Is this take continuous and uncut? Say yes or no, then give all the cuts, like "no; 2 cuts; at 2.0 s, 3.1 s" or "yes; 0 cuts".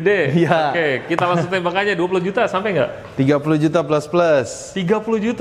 yes; 0 cuts